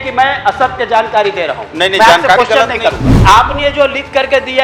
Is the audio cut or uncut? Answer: cut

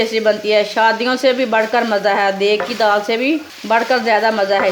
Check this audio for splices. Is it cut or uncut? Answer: cut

